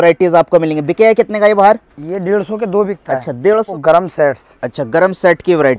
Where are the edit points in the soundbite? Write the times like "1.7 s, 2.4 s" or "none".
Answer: 3.7 s